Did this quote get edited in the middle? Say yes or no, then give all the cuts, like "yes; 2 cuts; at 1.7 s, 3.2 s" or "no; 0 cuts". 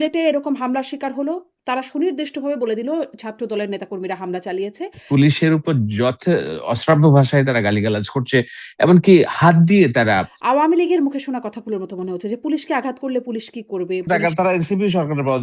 yes; 3 cuts; at 4.9 s, 10.3 s, 14.1 s